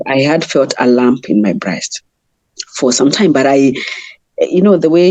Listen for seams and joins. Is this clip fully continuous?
yes; 0 cuts

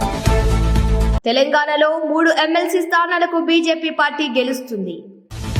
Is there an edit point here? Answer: yes; 1 cut; at 1.2 s

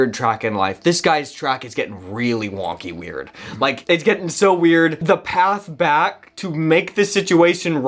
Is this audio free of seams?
no; 2 cuts; at 3.8 s, 5.0 s

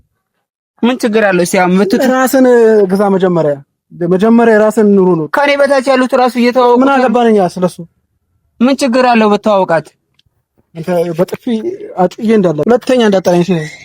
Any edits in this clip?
yes; 1 cut; at 12.6 s

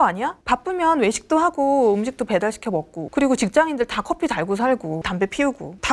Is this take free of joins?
no; 2 cuts; at 3.0 s, 5.0 s

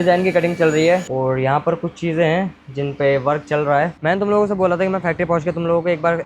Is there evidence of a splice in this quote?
yes; 2 cuts; at 1.0 s, 3.9 s

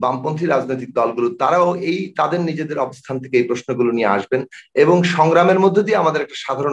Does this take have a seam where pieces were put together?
no; 0 cuts

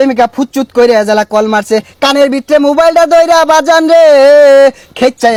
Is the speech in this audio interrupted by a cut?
no; 0 cuts

